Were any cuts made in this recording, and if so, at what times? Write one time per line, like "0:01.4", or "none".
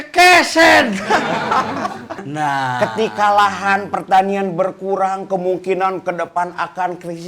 0:02.2